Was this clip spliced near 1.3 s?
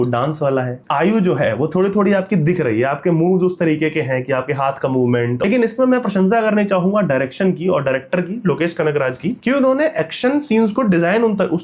no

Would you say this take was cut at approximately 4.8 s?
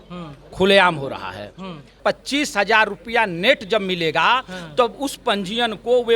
no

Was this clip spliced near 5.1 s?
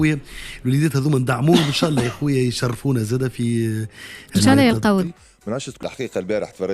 yes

